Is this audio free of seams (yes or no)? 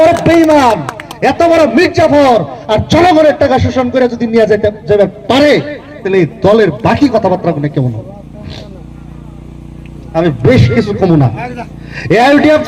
yes